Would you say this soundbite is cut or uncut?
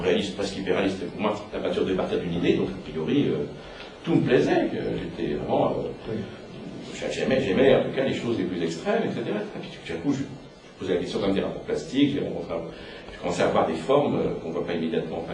cut